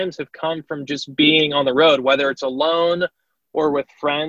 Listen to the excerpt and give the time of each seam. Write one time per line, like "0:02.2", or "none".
none